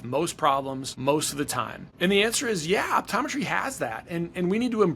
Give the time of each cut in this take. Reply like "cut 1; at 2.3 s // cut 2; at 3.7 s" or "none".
cut 1; at 0.9 s // cut 2; at 1.8 s